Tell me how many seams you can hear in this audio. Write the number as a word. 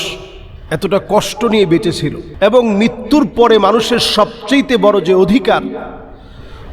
one